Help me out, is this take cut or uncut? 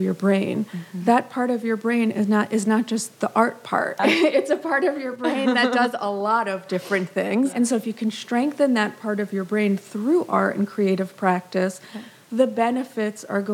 cut